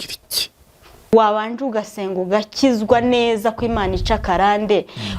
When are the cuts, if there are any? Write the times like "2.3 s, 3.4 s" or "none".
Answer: 1.1 s